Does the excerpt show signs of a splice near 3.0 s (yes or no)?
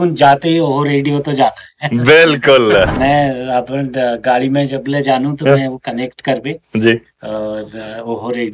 yes